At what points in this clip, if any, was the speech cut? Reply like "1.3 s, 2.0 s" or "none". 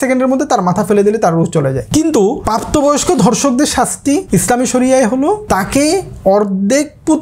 1.8 s, 2.4 s, 4.2 s, 5.4 s